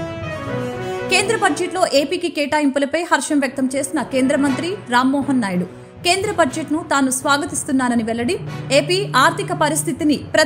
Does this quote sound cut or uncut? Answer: cut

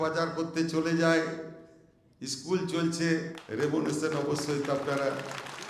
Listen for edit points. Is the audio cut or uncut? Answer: cut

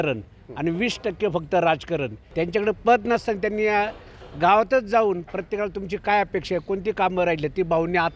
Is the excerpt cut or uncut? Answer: cut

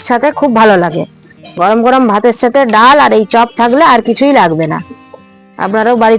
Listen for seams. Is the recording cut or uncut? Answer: uncut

